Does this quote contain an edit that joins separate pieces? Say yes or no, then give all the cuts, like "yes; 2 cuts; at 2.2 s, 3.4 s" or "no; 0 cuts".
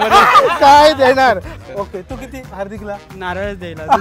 yes; 1 cut; at 1.5 s